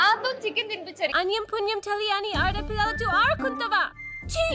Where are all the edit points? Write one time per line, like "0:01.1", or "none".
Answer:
0:01.1